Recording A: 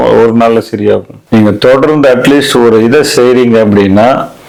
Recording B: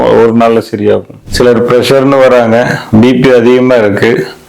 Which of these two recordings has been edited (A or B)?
B